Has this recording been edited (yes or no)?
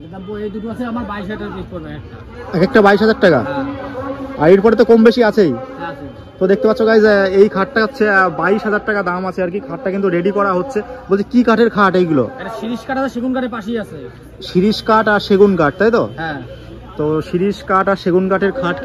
no